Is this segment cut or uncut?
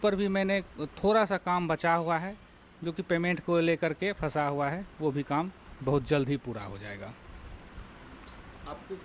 uncut